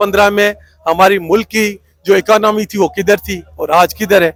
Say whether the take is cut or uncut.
uncut